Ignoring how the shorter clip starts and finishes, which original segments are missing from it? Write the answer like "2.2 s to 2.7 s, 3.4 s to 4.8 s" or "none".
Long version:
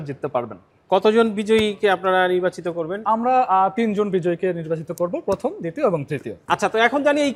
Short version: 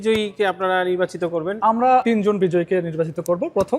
3.5 s to 3.7 s